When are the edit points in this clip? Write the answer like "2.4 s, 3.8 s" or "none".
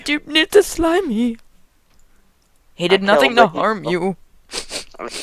2.4 s